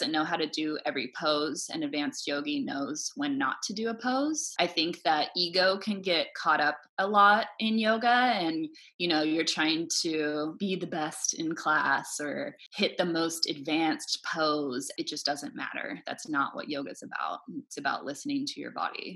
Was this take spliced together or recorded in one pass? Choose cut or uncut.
cut